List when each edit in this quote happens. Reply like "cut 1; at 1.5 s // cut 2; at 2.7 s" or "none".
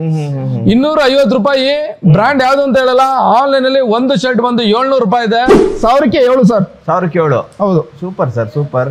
cut 1; at 5.6 s